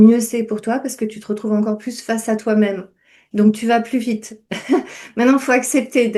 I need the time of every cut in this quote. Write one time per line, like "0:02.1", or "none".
none